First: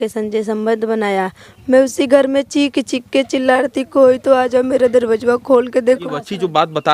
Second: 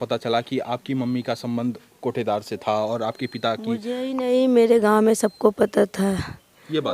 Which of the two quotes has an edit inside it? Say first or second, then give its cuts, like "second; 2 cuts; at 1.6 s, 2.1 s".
first; 2 cuts; at 1.5 s, 6.0 s